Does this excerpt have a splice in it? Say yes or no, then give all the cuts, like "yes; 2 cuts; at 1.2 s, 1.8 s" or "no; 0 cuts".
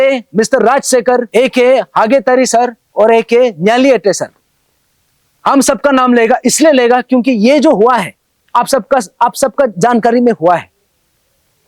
yes; 1 cut; at 1.3 s